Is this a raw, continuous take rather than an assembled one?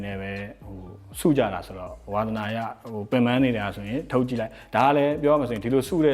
yes; 0 cuts

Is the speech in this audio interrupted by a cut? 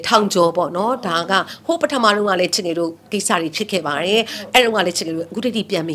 no; 0 cuts

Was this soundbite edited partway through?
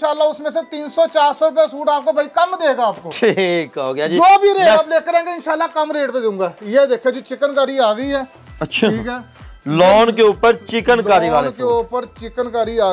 no; 0 cuts

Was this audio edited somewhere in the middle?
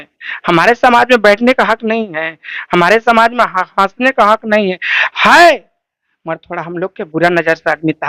no; 0 cuts

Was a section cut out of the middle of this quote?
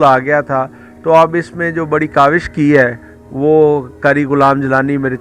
no; 0 cuts

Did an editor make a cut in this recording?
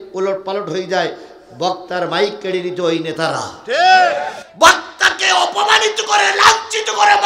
no; 0 cuts

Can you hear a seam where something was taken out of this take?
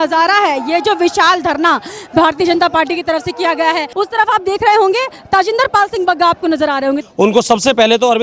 yes; 2 cuts; at 3.9 s, 7.0 s

